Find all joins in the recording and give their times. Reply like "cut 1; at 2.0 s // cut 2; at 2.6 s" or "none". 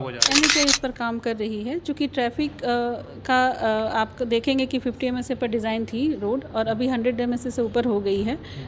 none